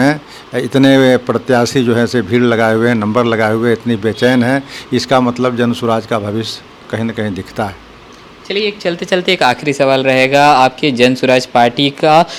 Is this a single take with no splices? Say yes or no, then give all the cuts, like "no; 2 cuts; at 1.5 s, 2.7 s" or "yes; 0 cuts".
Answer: yes; 0 cuts